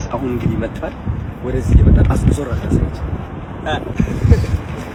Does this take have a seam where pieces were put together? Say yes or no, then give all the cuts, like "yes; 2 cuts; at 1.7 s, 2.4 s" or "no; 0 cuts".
no; 0 cuts